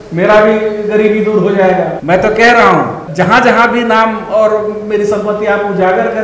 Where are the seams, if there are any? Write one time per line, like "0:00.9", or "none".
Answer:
0:02.0
0:03.0